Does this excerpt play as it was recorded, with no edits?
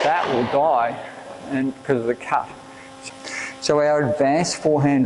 no; 1 cut; at 2.9 s

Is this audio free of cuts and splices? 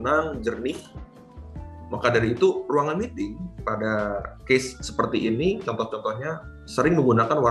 yes; 0 cuts

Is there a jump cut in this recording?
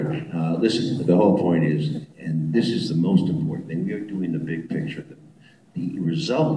yes; 1 cut; at 4.6 s

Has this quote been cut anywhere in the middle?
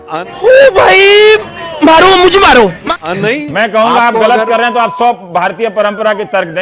yes; 1 cut; at 2.8 s

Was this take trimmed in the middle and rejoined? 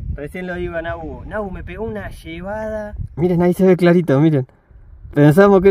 yes; 1 cut; at 3.0 s

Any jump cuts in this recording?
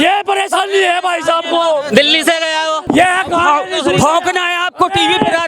yes; 1 cut; at 2.8 s

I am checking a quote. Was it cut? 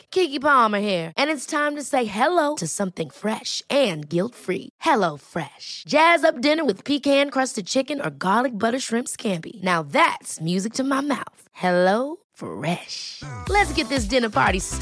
no; 0 cuts

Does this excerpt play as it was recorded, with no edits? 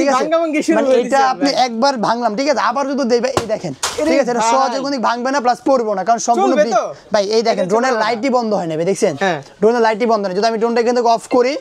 yes; 0 cuts

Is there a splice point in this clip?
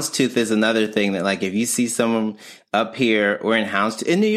no; 0 cuts

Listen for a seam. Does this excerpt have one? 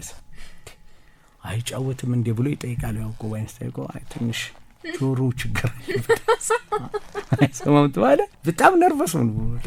yes; 1 cut; at 8.4 s

